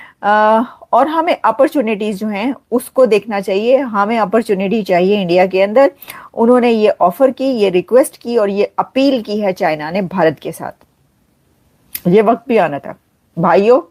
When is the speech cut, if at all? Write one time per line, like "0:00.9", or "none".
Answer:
none